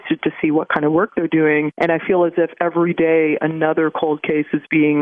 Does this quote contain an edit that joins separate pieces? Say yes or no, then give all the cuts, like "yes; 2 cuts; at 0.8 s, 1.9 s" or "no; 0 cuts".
no; 0 cuts